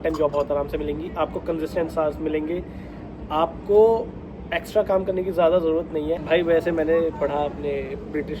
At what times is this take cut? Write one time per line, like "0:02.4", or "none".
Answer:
0:06.2